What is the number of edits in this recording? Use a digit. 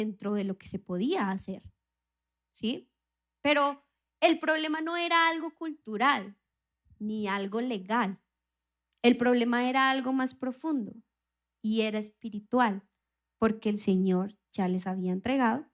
0